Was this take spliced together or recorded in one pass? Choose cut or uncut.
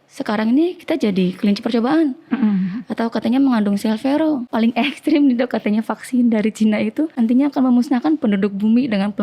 cut